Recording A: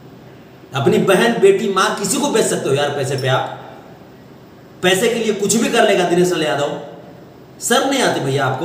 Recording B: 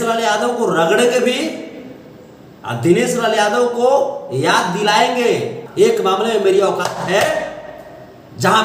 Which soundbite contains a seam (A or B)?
B